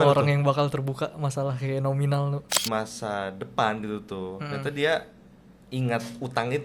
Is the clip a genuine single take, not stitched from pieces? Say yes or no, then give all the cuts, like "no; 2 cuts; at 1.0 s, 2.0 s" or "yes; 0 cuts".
no; 1 cut; at 2.6 s